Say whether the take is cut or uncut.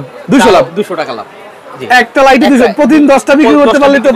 uncut